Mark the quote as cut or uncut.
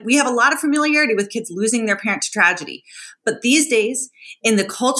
uncut